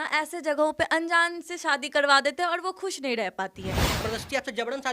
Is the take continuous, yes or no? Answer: no